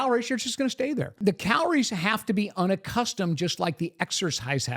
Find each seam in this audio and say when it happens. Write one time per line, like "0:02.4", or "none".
0:01.1